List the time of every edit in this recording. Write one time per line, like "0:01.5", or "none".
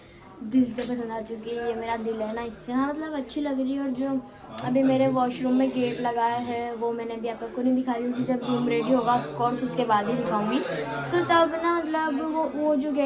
none